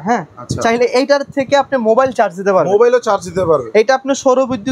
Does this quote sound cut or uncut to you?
uncut